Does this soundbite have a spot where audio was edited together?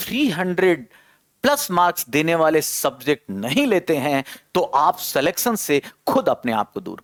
no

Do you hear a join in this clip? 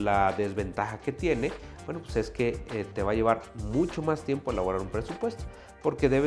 no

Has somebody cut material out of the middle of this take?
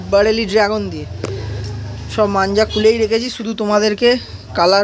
no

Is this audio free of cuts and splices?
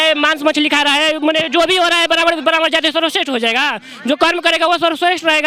yes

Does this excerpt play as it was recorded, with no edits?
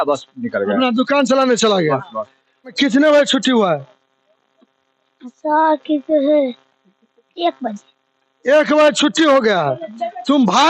no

